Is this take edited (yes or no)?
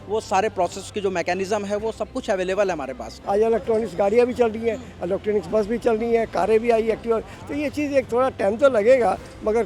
yes